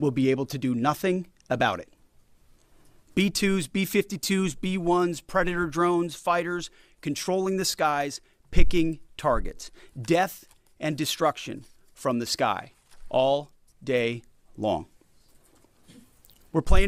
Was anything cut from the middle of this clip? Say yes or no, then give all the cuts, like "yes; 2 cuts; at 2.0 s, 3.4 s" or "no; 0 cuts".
no; 0 cuts